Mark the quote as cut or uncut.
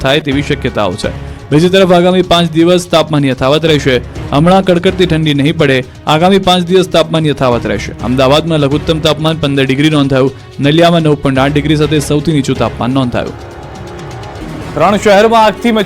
cut